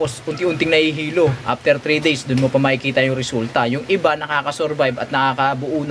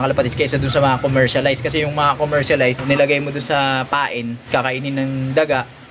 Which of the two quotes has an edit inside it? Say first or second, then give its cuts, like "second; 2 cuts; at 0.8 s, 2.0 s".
second; 2 cuts; at 2.8 s, 4.4 s